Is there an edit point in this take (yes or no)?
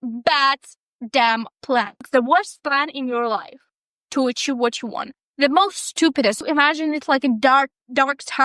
yes